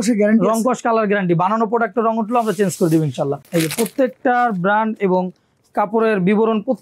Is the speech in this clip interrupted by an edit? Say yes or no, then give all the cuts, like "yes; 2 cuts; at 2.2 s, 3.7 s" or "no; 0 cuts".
yes; 1 cut; at 3.4 s